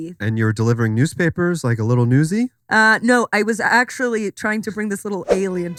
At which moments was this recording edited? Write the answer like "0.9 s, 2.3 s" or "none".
none